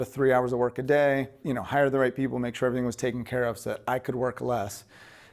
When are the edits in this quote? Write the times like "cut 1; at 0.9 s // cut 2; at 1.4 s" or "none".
cut 1; at 1.4 s